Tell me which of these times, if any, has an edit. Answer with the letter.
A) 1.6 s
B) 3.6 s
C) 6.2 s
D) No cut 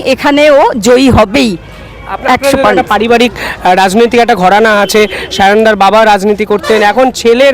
D